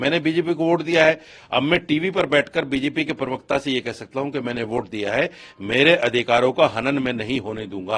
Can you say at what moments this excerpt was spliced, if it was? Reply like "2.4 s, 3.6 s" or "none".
none